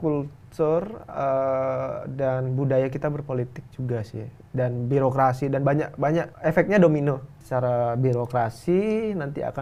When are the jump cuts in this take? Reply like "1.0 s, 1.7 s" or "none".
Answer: 6.3 s, 7.4 s